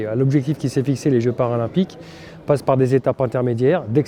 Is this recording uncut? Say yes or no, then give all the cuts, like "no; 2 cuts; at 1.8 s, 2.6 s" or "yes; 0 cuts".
yes; 0 cuts